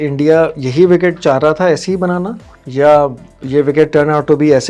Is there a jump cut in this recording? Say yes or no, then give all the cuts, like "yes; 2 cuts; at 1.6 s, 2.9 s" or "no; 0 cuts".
no; 0 cuts